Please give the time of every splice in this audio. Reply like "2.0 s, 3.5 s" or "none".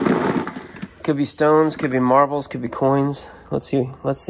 none